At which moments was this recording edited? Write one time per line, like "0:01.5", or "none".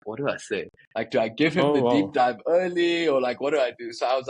none